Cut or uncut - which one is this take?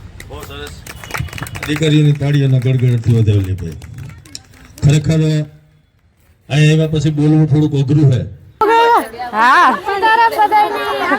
cut